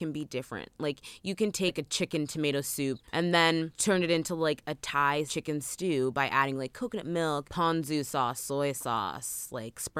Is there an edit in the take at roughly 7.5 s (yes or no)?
yes